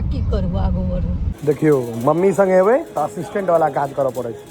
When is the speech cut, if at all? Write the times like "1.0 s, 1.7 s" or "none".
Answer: 1.3 s